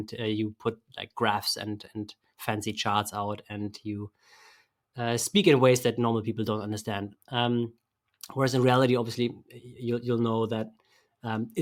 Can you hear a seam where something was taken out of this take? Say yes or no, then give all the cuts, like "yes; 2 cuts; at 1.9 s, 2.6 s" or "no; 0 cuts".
no; 0 cuts